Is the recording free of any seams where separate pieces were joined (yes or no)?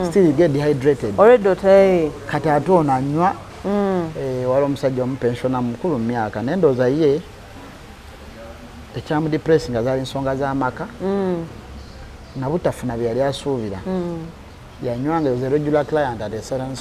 no